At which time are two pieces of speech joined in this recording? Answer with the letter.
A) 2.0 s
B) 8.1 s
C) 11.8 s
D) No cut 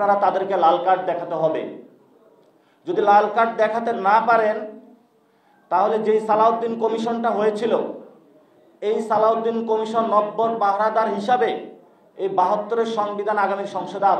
D